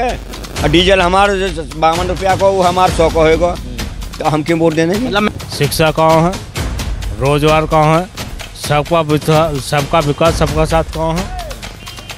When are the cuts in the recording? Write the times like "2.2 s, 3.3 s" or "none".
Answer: 5.3 s